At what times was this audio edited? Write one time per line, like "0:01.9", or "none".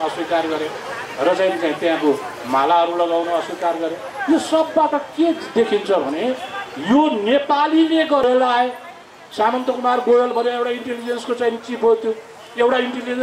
0:08.2